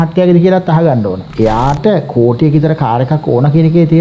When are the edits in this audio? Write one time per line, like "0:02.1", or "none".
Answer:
0:01.2